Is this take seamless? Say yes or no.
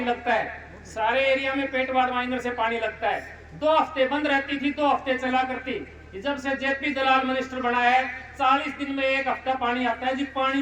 yes